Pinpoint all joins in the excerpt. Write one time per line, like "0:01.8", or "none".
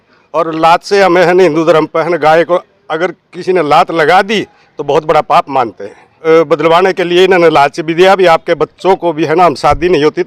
0:06.1

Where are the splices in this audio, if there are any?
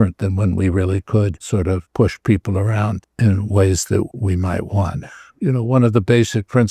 0:01.8
0:03.0
0:04.1
0:05.3

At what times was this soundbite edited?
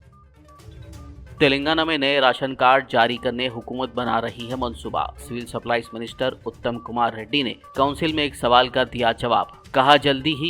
0:00.9

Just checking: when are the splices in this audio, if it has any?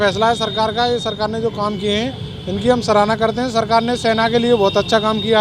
none

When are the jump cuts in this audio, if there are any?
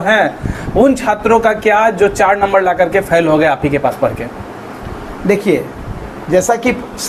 none

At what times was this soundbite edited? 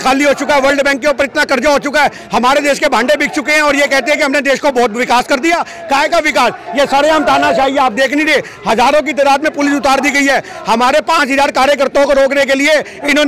none

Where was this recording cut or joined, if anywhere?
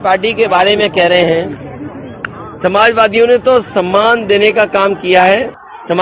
none

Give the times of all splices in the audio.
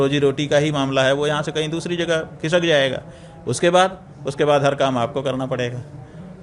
none

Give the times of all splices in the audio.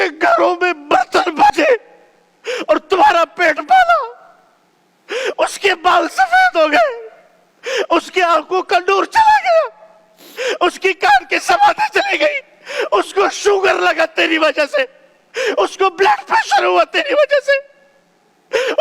0:01.5

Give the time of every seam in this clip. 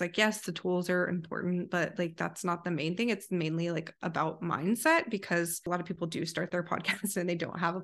0:05.7

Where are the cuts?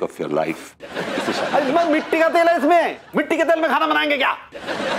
none

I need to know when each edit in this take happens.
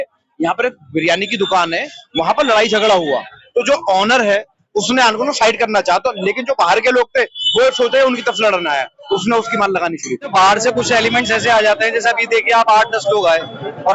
0:10.3

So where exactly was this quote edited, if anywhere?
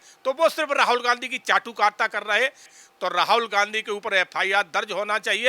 0:02.7

